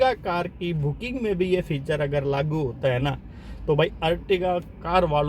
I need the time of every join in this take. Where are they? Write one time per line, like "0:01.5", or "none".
none